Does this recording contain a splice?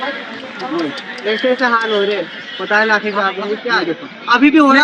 no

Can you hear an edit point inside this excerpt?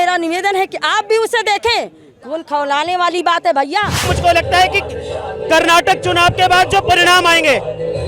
yes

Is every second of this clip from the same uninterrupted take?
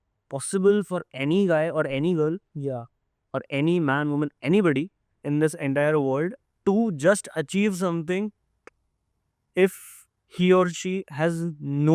yes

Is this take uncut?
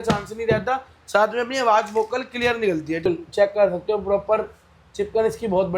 no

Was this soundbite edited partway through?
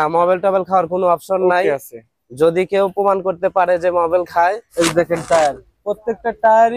yes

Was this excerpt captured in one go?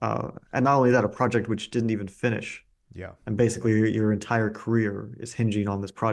yes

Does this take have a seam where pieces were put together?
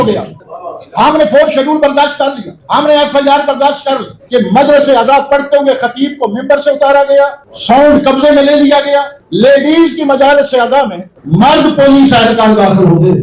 yes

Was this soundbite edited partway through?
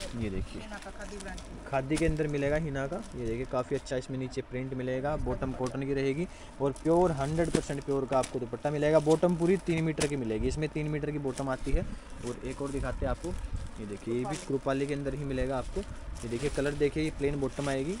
no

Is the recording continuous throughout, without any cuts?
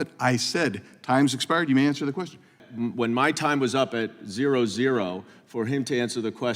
no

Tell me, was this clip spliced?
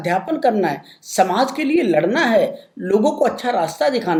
no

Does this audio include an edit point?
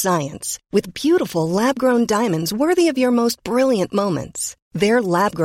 no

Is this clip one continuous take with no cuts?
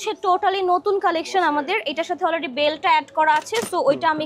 yes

